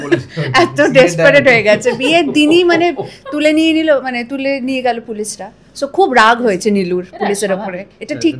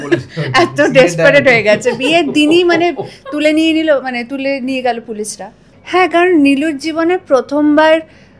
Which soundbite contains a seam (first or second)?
second